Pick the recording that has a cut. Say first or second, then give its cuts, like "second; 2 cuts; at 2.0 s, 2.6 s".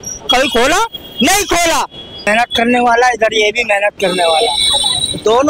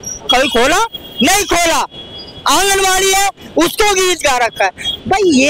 first; 1 cut; at 2.3 s